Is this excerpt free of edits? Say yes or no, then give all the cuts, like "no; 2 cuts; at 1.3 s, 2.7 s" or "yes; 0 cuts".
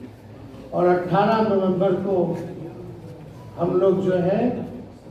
yes; 0 cuts